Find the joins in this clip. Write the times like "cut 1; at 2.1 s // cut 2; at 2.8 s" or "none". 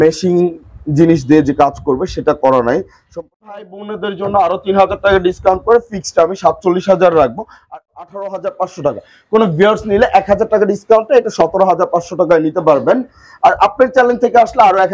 cut 1; at 3.1 s // cut 2; at 7.5 s